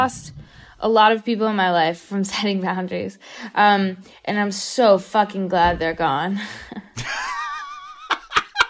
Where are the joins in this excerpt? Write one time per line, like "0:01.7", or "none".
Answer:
none